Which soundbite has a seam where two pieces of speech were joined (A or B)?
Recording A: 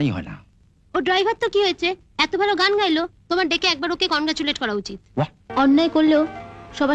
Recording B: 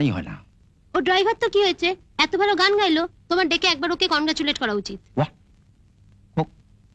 A